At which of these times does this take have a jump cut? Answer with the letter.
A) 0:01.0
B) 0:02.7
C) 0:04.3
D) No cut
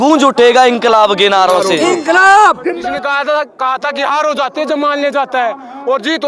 B